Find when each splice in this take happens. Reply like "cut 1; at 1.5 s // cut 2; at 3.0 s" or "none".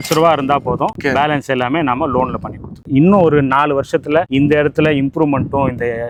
none